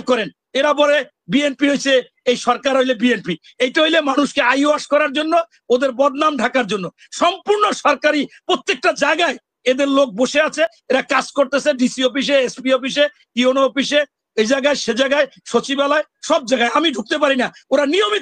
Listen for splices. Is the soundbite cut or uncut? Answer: uncut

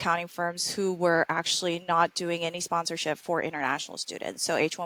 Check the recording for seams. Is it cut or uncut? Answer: uncut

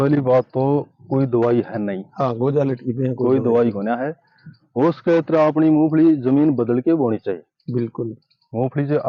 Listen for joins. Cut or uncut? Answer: uncut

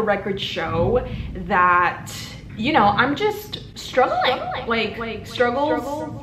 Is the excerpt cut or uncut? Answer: uncut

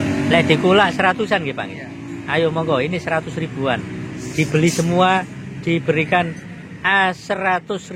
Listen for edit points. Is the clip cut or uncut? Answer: uncut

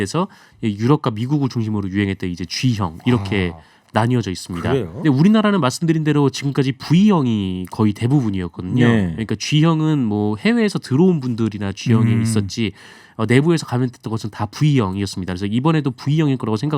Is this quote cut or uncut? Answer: cut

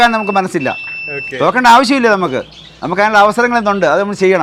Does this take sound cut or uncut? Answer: uncut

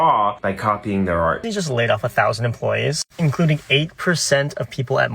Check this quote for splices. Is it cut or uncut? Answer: cut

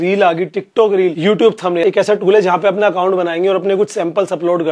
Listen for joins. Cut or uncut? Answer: cut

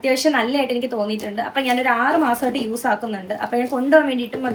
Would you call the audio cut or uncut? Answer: uncut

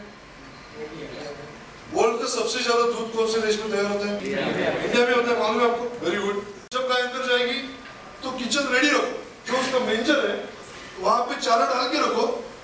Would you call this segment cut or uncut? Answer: cut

